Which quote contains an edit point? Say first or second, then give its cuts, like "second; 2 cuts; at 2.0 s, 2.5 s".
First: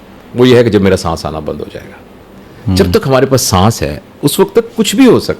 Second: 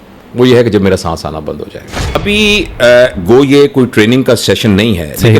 second; 1 cut; at 2.2 s